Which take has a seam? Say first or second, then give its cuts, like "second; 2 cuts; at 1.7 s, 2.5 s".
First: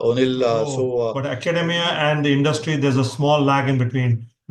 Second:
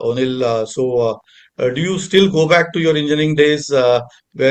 first; 1 cut; at 1.2 s